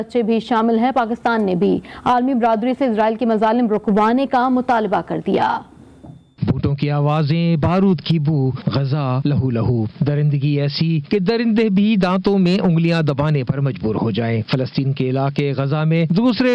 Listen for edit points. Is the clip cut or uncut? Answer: uncut